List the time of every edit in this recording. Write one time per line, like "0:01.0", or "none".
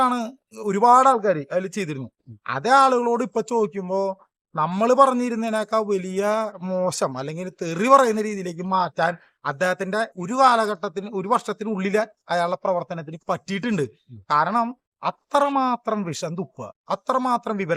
none